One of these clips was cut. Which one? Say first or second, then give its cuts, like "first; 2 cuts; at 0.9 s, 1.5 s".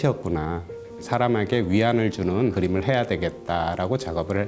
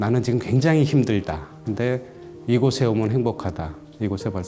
first; 2 cuts; at 0.9 s, 2.5 s